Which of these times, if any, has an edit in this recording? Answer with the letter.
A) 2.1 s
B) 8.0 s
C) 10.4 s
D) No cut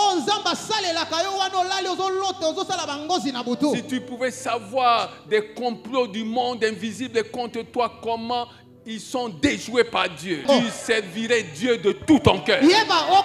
C